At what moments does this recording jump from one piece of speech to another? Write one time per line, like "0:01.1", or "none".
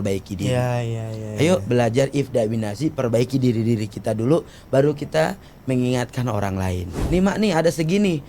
0:07.0